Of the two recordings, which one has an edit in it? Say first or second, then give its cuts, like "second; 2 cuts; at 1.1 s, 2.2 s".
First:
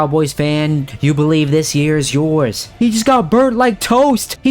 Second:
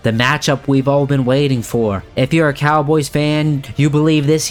first; 1 cut; at 2.7 s